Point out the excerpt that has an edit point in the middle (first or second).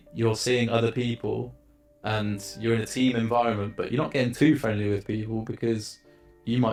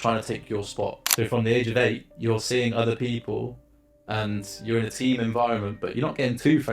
second